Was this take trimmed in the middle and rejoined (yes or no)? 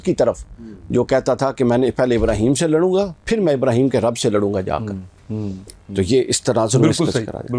no